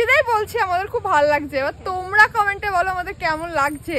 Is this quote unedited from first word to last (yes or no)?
yes